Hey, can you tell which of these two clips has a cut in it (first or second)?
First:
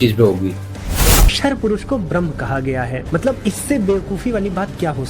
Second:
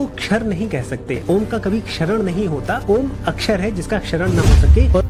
first